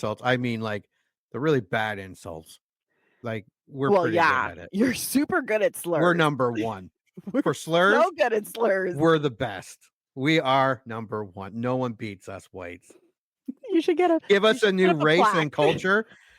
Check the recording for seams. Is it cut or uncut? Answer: cut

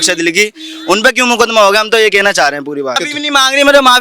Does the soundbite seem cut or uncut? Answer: cut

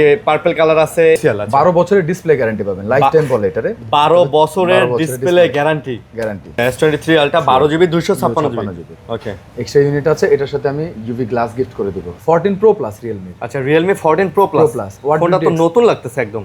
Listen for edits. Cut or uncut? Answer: cut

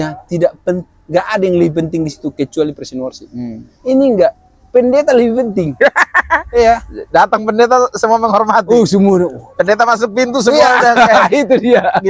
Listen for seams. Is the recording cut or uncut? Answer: uncut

